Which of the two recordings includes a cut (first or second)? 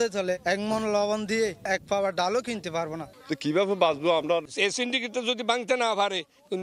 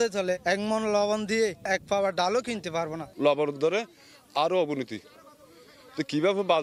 first